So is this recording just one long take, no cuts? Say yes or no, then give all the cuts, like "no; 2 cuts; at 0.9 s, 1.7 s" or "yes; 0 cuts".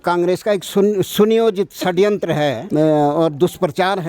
no; 1 cut; at 2.6 s